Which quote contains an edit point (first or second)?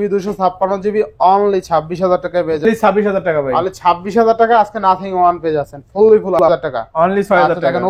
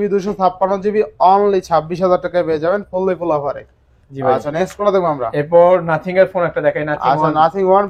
first